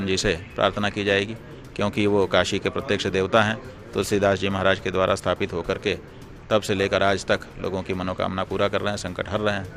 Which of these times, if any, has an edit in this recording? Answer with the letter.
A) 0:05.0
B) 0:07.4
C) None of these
C